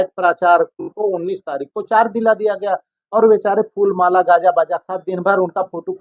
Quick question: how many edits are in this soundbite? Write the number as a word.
one